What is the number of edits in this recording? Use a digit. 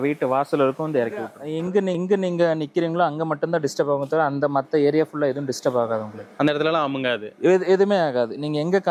1